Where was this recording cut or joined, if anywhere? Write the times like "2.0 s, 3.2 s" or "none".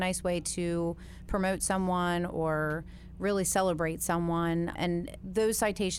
4.8 s